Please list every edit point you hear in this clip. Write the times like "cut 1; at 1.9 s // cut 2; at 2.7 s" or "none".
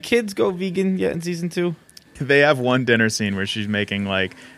cut 1; at 2.1 s